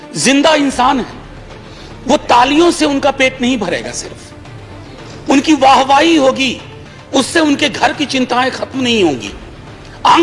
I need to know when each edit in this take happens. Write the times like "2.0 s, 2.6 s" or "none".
none